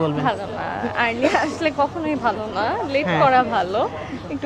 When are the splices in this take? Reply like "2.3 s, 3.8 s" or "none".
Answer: none